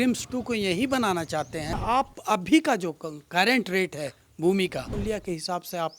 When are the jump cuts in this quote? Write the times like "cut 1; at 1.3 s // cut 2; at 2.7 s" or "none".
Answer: cut 1; at 1.8 s // cut 2; at 5.0 s

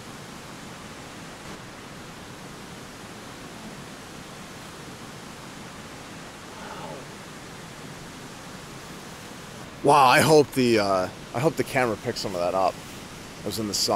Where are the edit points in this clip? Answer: cut 1; at 1.4 s // cut 2; at 9.9 s

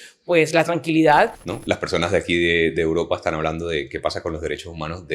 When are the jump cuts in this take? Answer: cut 1; at 1.4 s

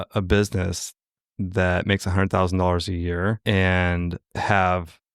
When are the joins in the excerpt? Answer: cut 1; at 3.4 s // cut 2; at 4.2 s

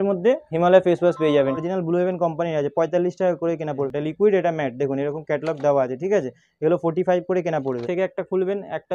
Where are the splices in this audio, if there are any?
cut 1; at 1.6 s // cut 2; at 3.9 s // cut 3; at 7.8 s

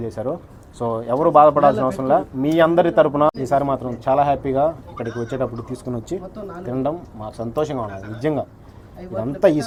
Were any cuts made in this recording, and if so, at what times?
none

